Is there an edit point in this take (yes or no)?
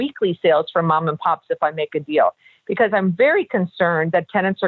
no